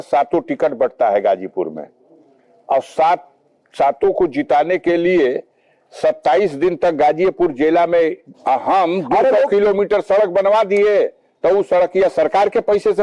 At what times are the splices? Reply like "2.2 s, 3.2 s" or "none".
8.3 s